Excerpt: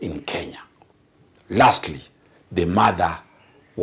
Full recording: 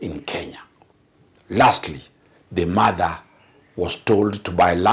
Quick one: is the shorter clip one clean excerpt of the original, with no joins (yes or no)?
yes